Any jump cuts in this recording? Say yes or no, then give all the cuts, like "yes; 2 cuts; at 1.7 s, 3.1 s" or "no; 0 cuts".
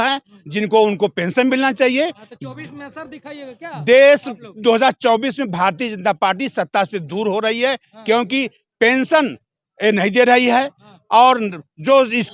no; 0 cuts